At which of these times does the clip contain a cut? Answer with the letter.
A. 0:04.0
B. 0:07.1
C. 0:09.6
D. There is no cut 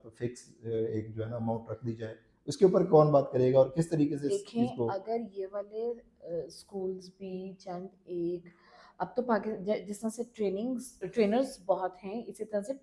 D